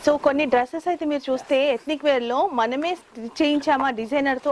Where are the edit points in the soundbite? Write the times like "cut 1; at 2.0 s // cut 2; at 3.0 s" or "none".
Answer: none